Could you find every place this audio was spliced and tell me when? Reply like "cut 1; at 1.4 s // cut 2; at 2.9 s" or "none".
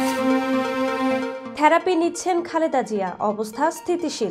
cut 1; at 1.4 s